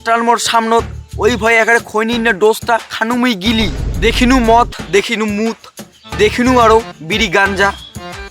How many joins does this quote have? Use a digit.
1